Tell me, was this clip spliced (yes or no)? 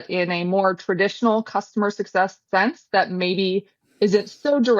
no